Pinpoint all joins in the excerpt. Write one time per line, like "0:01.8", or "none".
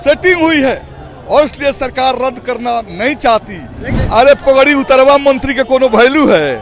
0:03.9

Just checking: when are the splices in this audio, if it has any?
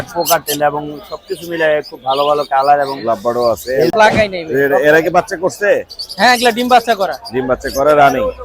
0:03.9

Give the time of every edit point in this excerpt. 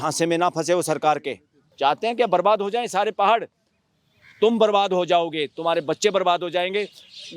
0:01.7

